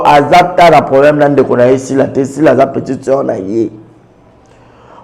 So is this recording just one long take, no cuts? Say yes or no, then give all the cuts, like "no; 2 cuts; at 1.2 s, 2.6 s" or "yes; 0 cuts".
yes; 0 cuts